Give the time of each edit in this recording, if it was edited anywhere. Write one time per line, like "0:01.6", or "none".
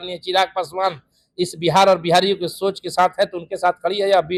none